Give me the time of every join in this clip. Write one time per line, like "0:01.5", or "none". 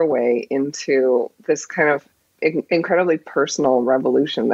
0:02.2